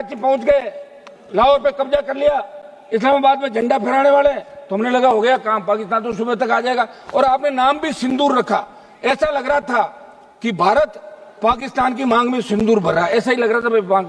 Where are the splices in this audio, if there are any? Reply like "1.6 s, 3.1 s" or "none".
none